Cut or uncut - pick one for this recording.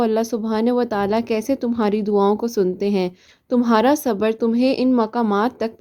uncut